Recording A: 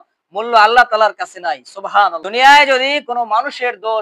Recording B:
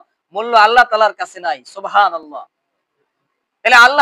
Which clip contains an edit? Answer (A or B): A